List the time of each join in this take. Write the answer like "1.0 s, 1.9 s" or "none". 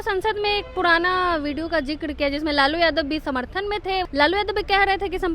4.1 s